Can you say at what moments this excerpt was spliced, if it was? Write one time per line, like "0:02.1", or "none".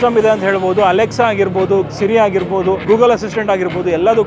0:02.8